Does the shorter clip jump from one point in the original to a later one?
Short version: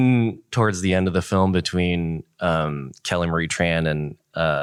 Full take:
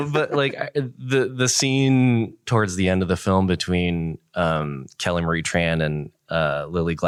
no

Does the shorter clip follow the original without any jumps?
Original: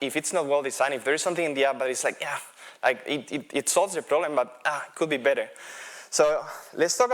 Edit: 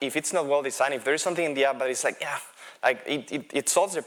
yes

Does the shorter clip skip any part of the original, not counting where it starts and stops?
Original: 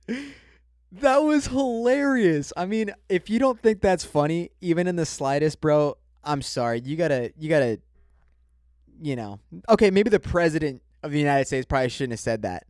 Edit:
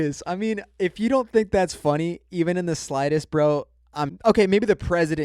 yes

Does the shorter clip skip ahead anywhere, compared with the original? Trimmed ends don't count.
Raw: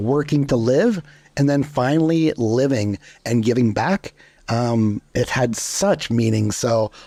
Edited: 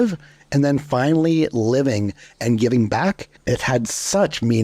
yes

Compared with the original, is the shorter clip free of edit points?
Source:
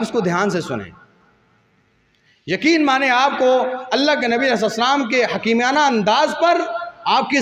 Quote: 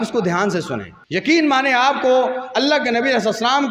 no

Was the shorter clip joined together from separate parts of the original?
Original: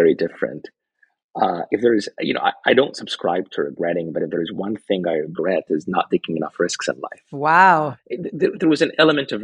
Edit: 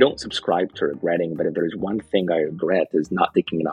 no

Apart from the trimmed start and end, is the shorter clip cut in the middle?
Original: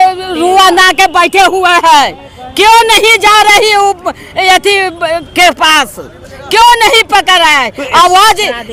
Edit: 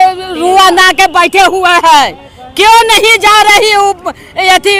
no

